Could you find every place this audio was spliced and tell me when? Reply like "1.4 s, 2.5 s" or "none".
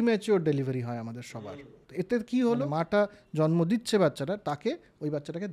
1.7 s, 2.7 s